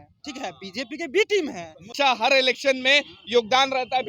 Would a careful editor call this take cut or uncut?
cut